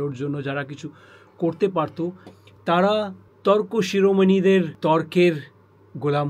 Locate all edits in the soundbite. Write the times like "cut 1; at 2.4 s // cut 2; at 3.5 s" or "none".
cut 1; at 3.2 s // cut 2; at 4.7 s